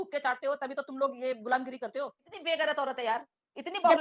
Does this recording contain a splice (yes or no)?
yes